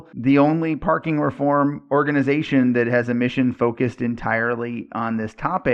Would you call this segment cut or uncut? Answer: uncut